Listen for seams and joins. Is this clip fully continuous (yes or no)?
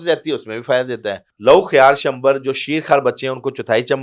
no